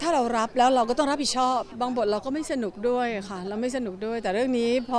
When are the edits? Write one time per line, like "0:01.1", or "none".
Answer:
0:01.7